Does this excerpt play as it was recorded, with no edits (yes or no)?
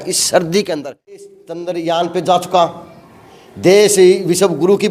no